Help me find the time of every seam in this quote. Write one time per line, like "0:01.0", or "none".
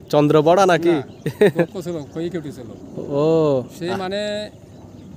none